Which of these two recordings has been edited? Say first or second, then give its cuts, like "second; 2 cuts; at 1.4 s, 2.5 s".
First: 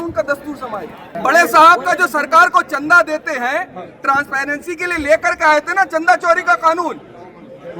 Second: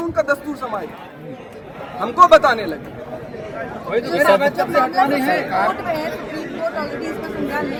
first; 1 cut; at 1.0 s